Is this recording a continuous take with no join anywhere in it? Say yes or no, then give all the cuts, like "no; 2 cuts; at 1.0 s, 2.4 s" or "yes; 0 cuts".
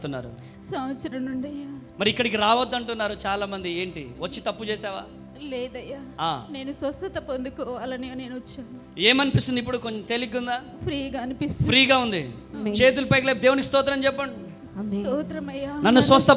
yes; 0 cuts